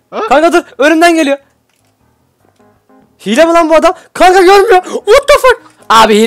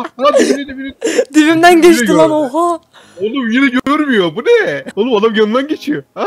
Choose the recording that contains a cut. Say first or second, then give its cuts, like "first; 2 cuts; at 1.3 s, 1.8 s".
second; 1 cut; at 4.8 s